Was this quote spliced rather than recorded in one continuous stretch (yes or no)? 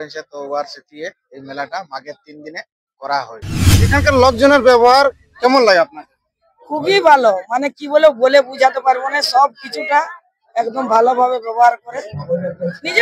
yes